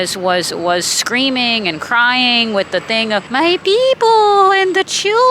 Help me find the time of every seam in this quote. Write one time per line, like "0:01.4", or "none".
0:03.3